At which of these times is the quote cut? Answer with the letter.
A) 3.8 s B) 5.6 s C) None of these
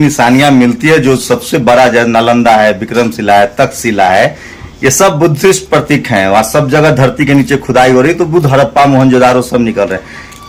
C